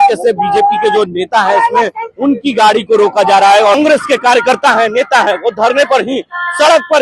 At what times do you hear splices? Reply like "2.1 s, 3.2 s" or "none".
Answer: 3.8 s